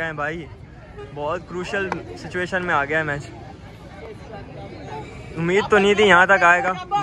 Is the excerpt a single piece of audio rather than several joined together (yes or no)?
yes